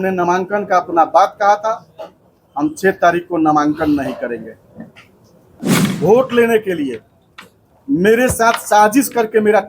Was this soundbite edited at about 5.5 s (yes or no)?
yes